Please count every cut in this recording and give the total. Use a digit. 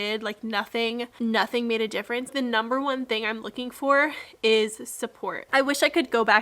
2